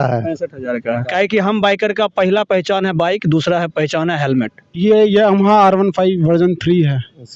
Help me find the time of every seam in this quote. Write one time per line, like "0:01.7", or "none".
0:01.1
0:04.8